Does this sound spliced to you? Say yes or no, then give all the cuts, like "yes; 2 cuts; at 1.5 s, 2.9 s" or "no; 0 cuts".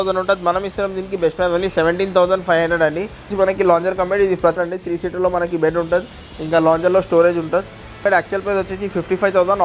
yes; 3 cuts; at 3.3 s, 4.6 s, 8.0 s